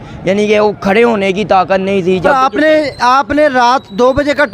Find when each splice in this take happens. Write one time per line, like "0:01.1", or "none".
0:02.3